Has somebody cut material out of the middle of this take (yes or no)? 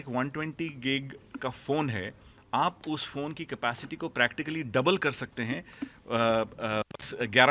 no